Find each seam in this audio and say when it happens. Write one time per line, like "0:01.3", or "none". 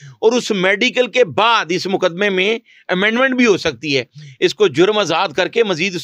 none